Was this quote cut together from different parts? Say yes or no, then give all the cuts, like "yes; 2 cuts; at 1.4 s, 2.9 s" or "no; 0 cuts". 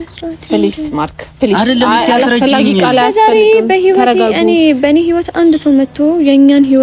no; 0 cuts